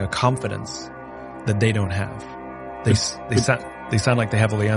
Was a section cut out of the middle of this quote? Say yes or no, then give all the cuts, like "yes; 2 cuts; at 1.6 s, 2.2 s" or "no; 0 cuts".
no; 0 cuts